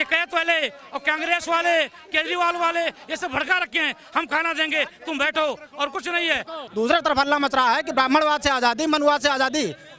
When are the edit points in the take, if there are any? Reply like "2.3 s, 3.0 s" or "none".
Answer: 6.6 s

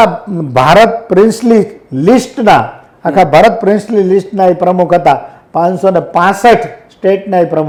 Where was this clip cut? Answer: none

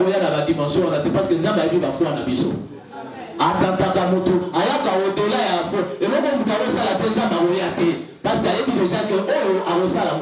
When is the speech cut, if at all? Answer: none

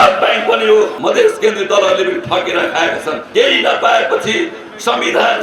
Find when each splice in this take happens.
0.9 s, 3.2 s

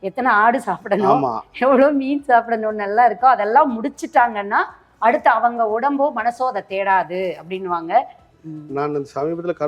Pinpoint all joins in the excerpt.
8.2 s

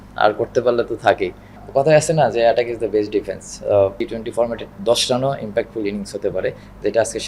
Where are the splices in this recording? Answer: 1.6 s, 4.0 s

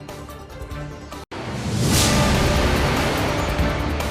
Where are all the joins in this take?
1.2 s

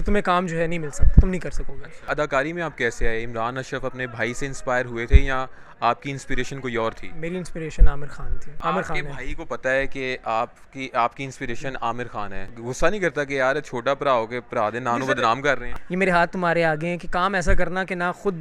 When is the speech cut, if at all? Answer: 2.0 s, 8.5 s, 12.5 s, 15.7 s

